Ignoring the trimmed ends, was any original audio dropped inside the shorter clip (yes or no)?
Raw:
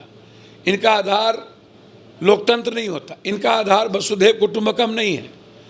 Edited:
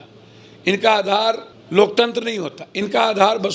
yes